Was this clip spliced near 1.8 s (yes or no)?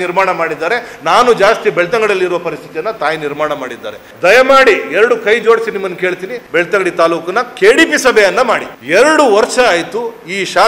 no